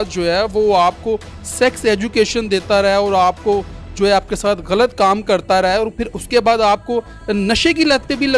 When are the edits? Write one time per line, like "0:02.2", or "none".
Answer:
none